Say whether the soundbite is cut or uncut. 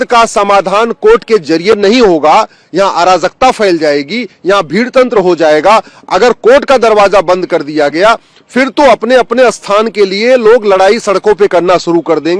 uncut